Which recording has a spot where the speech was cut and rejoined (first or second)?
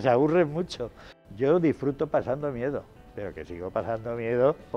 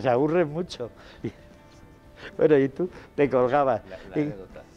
first